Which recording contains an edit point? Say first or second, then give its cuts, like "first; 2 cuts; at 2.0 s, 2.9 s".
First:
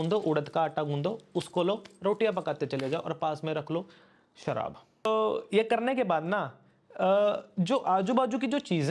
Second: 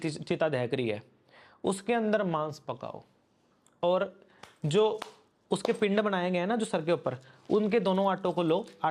first; 1 cut; at 5.1 s